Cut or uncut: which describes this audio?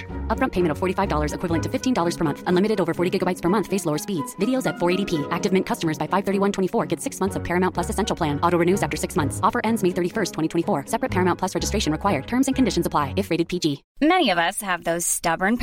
cut